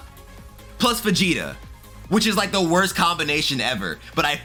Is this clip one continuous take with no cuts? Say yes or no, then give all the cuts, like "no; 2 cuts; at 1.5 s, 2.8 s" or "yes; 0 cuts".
yes; 0 cuts